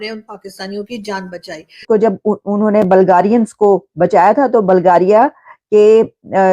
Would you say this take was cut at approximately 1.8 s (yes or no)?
yes